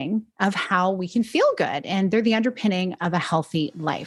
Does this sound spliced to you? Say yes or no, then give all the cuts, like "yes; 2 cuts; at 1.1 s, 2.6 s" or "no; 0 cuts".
no; 0 cuts